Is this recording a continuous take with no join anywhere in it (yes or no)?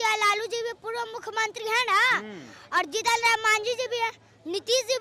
yes